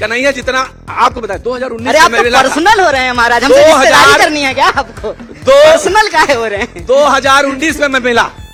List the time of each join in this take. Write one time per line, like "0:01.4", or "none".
none

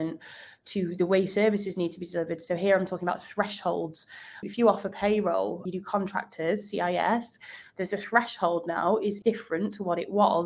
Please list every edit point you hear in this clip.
0:04.5
0:05.6
0:09.2

